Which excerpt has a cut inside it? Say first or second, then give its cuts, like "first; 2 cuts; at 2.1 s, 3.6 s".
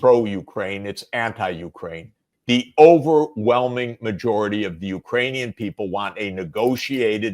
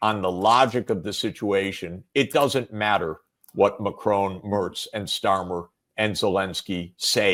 first; 1 cut; at 2.2 s